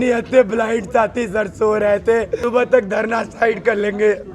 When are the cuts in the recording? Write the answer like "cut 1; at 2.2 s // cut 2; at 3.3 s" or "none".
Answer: cut 1; at 2.4 s